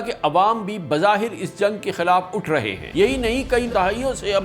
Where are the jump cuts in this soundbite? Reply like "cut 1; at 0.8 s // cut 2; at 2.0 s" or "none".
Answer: cut 1; at 2.8 s